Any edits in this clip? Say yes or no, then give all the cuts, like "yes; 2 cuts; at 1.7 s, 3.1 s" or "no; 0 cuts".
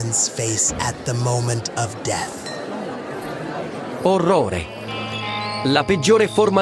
no; 0 cuts